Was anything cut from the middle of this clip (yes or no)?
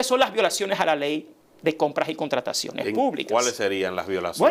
no